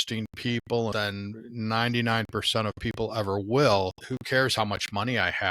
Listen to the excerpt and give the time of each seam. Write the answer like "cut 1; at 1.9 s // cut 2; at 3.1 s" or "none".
cut 1; at 0.9 s // cut 2; at 4.0 s